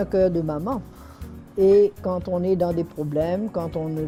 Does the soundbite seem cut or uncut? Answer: uncut